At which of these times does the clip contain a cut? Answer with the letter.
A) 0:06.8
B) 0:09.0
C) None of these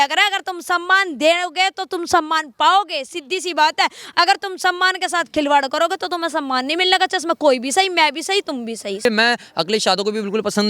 B